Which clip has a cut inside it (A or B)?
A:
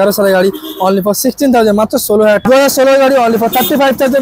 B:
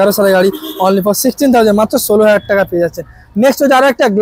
A